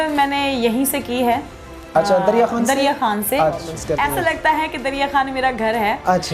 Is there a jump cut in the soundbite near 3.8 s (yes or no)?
yes